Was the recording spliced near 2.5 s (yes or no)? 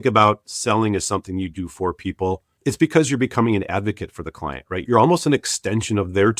yes